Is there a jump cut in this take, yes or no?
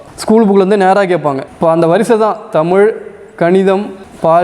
yes